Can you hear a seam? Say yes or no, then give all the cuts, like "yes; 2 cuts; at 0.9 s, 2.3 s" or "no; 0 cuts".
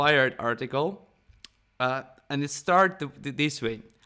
no; 0 cuts